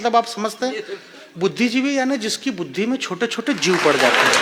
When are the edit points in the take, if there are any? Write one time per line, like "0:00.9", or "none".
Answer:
none